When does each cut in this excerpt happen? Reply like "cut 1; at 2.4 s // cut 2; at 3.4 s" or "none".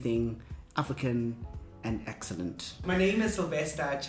cut 1; at 2.8 s